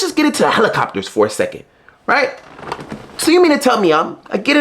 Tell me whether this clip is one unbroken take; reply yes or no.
yes